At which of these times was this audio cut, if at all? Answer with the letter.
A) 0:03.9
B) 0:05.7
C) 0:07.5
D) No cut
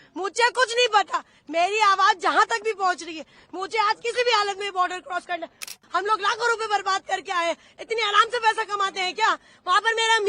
B